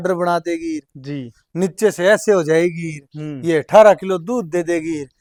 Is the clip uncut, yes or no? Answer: yes